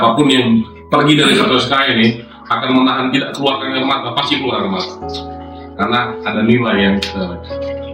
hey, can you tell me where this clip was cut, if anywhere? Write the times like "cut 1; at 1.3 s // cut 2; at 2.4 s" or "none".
none